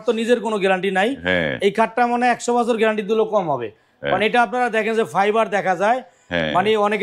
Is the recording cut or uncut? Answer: uncut